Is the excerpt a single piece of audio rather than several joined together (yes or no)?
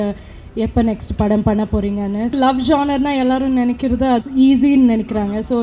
no